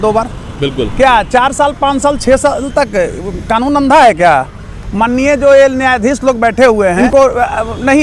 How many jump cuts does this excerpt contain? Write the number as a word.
one